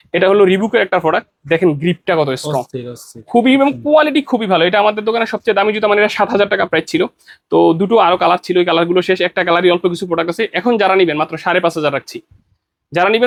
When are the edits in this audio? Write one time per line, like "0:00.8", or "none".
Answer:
none